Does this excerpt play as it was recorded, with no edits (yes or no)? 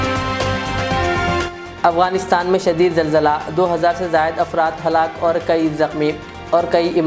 no